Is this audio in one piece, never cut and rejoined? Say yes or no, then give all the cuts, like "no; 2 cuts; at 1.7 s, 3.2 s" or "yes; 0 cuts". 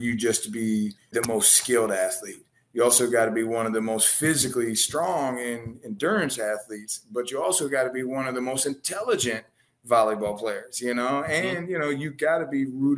yes; 0 cuts